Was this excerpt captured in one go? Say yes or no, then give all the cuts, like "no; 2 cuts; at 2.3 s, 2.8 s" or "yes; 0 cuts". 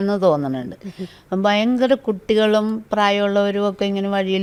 yes; 0 cuts